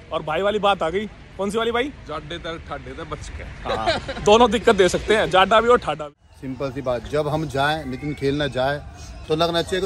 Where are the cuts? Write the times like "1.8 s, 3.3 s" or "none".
6.0 s